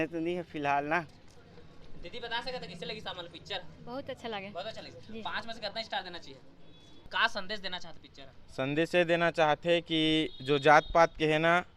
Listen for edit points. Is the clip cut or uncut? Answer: cut